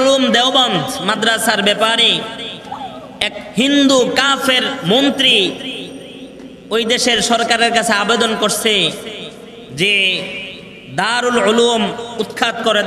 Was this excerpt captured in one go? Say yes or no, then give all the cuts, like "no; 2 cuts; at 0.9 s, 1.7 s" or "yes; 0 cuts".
yes; 0 cuts